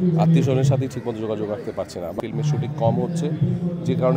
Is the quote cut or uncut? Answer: cut